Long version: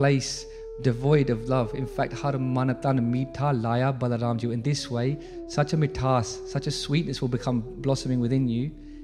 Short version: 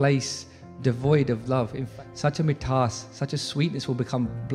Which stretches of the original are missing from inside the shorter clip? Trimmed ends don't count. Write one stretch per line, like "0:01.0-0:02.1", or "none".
0:01.9-0:05.2